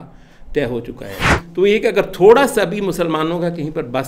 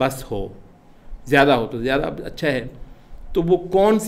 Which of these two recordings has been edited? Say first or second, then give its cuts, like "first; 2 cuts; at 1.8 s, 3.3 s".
first; 1 cut; at 1.3 s